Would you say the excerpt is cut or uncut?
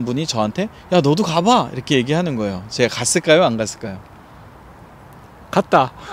uncut